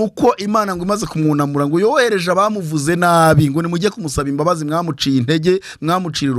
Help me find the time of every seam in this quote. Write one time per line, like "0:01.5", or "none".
none